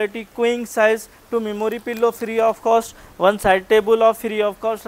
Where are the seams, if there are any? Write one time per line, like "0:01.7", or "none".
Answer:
0:01.1